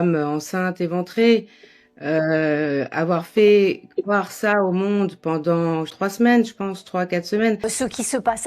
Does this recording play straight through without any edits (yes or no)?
no